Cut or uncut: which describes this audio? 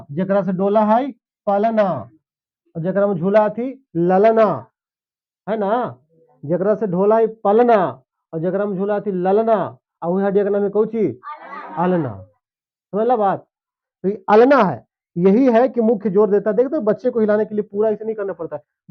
uncut